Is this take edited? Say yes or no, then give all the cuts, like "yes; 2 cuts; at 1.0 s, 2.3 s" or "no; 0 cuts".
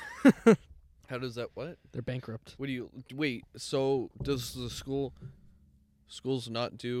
no; 0 cuts